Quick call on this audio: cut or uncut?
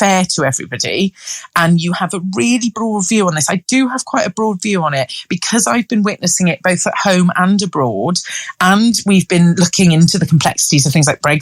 uncut